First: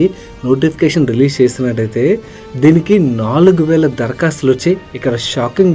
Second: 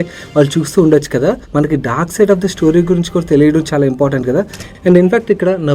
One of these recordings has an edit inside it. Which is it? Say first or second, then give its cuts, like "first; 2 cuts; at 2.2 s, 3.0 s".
second; 2 cuts; at 1.4 s, 4.6 s